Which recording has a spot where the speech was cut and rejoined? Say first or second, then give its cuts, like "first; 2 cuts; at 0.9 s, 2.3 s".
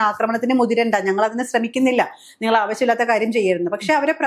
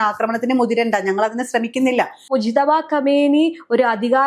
second; 1 cut; at 2.2 s